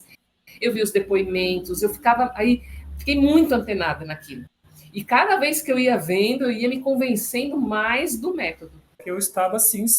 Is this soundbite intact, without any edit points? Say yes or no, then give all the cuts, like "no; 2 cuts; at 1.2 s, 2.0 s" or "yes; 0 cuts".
no; 1 cut; at 9.0 s